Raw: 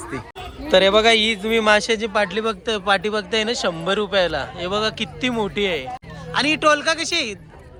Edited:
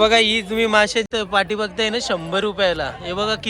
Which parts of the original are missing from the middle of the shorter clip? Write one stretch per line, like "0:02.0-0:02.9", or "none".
0:02.0-0:02.6